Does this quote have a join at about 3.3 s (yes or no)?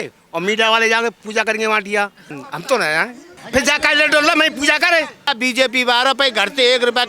yes